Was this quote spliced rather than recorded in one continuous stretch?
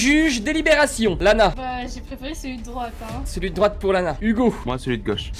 no; 0 cuts

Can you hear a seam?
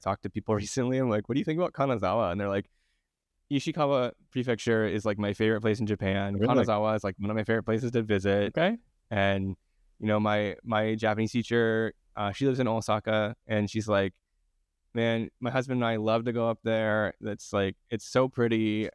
no; 0 cuts

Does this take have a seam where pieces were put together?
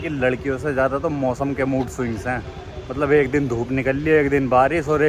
no; 0 cuts

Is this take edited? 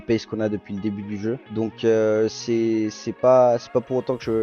yes; 1 cut; at 1.5 s

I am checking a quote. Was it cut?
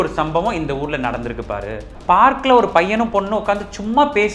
yes; 1 cut; at 1.9 s

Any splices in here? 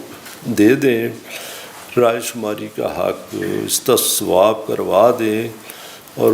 no; 0 cuts

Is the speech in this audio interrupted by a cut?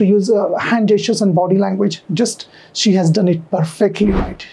no; 0 cuts

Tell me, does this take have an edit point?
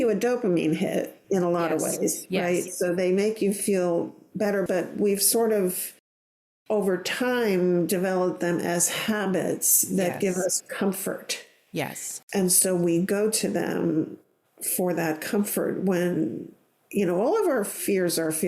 yes; 1 cut; at 1.2 s

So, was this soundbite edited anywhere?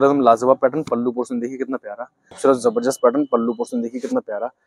yes; 1 cut; at 2.4 s

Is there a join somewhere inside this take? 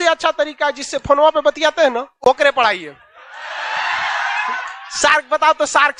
no; 0 cuts

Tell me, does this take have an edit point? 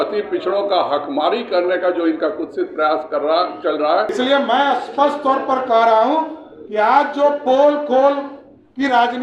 yes; 1 cut; at 4.1 s

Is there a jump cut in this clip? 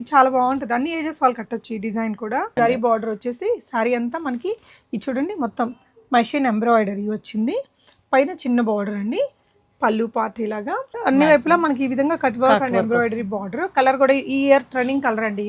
yes; 2 cuts; at 2.5 s, 11.0 s

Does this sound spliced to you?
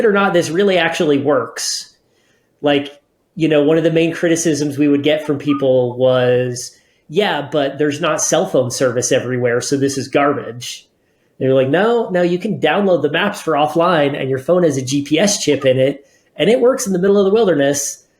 no; 0 cuts

